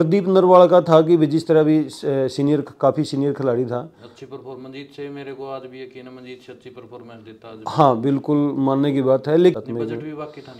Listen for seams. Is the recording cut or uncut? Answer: cut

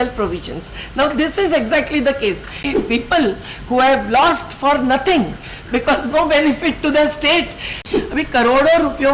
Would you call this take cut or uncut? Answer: cut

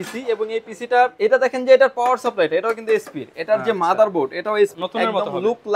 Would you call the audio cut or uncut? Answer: cut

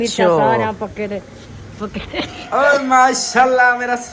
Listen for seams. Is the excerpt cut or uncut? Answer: cut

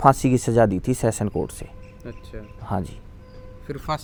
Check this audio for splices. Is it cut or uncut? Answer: uncut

